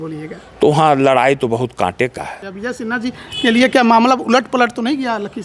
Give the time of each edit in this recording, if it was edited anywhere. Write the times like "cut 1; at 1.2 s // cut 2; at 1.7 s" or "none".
cut 1; at 2.4 s